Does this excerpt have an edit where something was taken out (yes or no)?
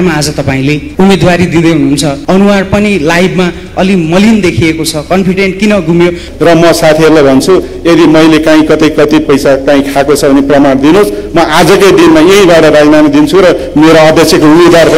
yes